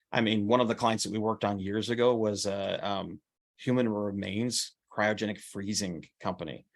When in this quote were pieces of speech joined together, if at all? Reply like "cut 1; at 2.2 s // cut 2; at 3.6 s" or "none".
none

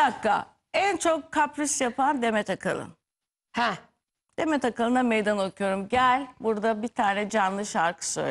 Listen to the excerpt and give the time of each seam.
none

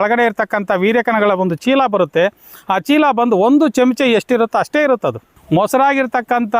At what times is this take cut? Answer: cut 1; at 5.2 s

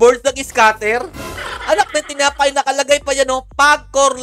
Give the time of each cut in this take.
none

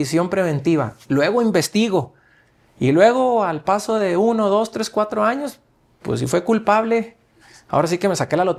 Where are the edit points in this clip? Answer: none

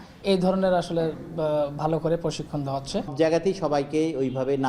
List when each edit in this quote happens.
cut 1; at 3.1 s

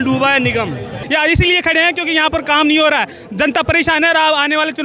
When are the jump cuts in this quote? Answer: cut 1; at 1.0 s

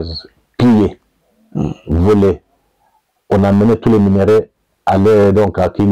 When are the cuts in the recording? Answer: none

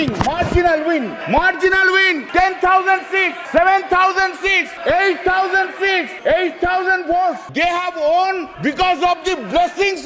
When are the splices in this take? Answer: cut 1; at 1.2 s // cut 2; at 2.2 s // cut 3; at 3.4 s // cut 4; at 4.7 s // cut 5; at 6.1 s // cut 6; at 7.5 s // cut 7; at 8.5 s

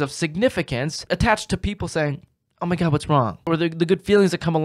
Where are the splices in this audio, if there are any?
cut 1; at 1.0 s // cut 2; at 3.4 s

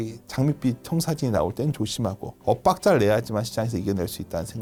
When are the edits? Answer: none

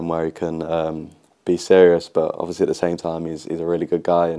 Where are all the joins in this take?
none

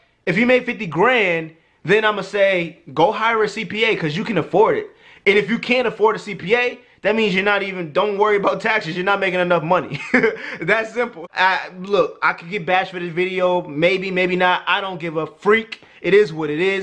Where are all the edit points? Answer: cut 1; at 11.2 s

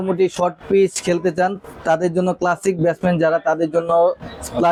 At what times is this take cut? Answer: none

